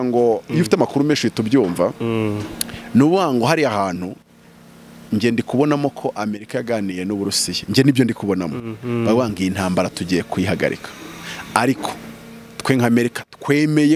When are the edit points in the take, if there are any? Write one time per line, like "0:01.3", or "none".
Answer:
none